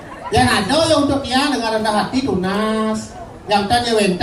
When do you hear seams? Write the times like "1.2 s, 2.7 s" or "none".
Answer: none